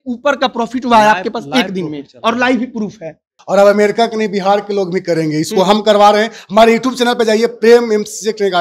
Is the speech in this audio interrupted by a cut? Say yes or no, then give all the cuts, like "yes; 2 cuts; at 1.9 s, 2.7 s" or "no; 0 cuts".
yes; 1 cut; at 3.3 s